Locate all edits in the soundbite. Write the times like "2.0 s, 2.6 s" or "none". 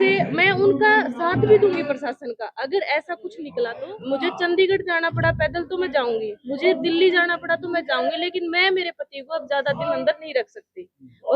3.9 s